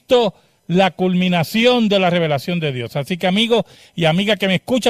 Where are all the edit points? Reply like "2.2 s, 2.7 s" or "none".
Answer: 3.6 s